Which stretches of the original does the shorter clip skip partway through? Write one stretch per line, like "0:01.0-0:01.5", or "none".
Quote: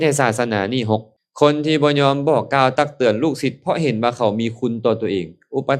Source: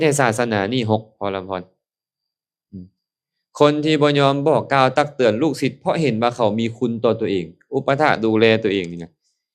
0:01.1-0:03.3